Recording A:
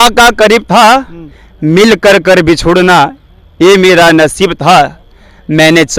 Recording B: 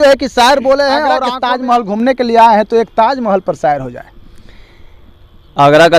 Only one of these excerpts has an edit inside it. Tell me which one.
B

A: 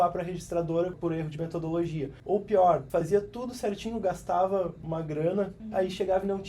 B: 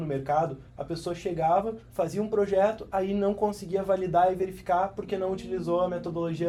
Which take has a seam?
A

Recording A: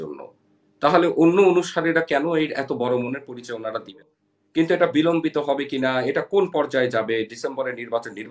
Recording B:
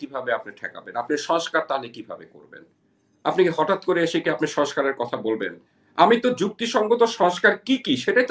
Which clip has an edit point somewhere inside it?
A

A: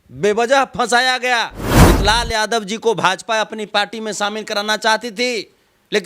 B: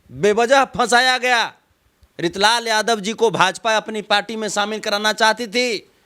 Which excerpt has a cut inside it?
A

